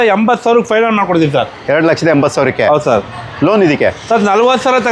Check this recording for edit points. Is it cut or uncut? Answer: uncut